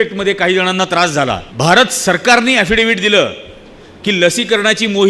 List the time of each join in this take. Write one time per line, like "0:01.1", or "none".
0:01.5

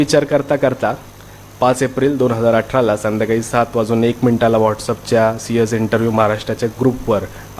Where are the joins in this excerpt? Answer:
none

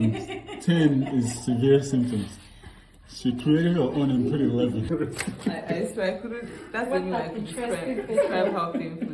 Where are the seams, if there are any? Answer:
0:04.9

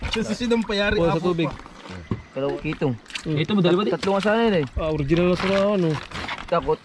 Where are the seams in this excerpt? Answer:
0:02.5

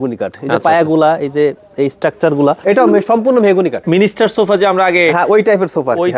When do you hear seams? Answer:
0:02.6
0:03.8

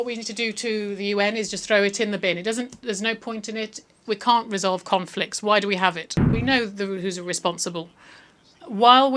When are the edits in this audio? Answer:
0:06.2

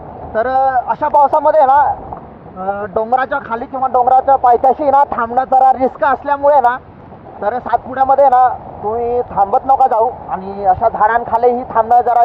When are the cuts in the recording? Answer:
none

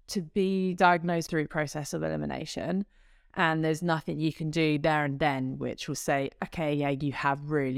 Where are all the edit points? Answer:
0:01.3

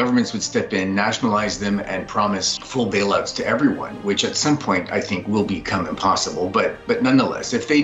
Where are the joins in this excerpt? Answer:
0:02.5

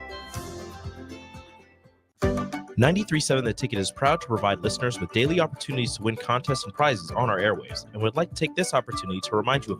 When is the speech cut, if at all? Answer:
0:02.0

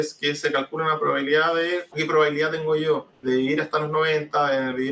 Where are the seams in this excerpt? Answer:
0:02.0
0:03.1

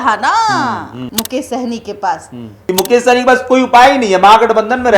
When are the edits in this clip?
0:01.0
0:02.6

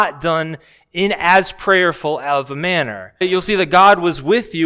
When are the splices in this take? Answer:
0:03.2

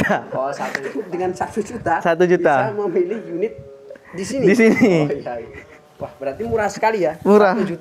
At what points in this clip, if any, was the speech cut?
0:00.9

